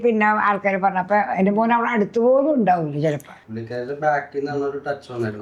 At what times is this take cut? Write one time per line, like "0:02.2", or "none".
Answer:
0:03.4